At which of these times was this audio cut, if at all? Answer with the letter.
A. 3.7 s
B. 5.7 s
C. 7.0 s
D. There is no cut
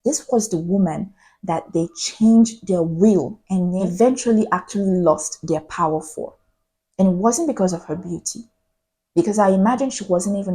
A